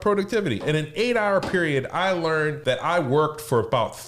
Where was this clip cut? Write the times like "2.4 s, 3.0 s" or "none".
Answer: 2.6 s